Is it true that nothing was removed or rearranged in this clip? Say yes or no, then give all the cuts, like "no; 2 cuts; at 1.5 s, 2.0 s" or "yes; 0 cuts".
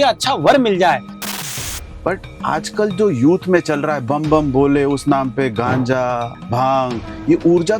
no; 2 cuts; at 1.4 s, 6.4 s